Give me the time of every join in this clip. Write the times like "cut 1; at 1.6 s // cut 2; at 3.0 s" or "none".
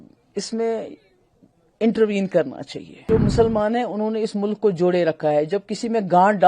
cut 1; at 3.1 s